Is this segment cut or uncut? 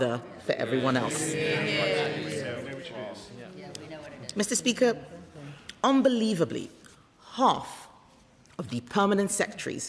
uncut